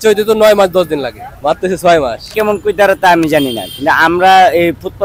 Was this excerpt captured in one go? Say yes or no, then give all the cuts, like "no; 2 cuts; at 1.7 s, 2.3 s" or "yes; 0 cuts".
no; 2 cuts; at 1.2 s, 2.3 s